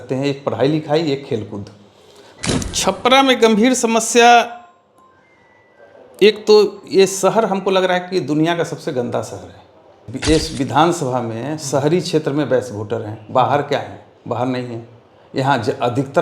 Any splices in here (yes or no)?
yes